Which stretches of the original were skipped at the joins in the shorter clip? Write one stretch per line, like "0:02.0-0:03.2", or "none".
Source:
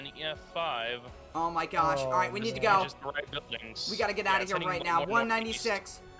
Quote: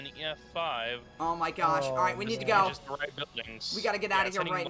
0:01.1-0:01.2